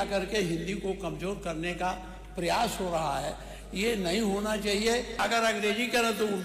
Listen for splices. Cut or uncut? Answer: cut